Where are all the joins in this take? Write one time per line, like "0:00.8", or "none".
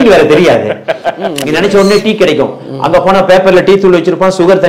0:00.9